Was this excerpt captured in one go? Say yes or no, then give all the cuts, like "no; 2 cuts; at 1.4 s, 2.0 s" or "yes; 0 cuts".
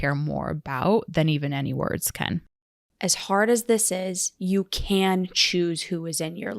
no; 1 cut; at 2.4 s